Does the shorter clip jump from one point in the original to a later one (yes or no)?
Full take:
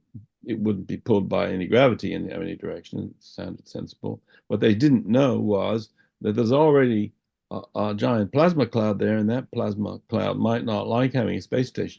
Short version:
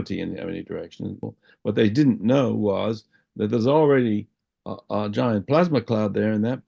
yes